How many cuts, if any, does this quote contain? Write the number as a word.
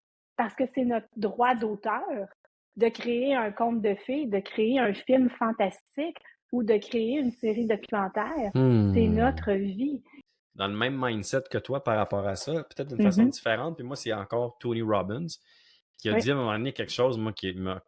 one